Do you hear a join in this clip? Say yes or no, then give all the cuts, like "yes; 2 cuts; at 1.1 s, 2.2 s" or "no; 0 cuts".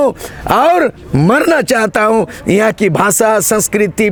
no; 0 cuts